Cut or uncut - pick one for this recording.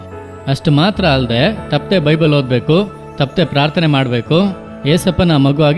uncut